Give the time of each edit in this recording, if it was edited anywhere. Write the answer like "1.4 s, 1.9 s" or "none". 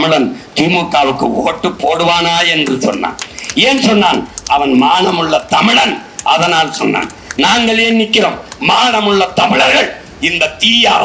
none